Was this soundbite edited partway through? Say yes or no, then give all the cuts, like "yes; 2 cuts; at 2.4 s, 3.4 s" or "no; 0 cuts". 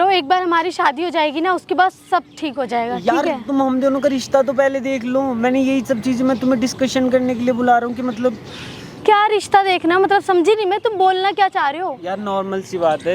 no; 0 cuts